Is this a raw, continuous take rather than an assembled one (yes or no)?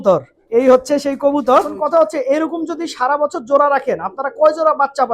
no